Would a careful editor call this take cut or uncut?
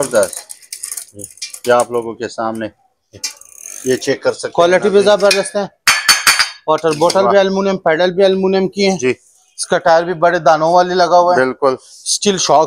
uncut